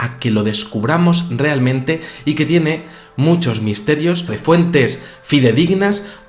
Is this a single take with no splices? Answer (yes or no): yes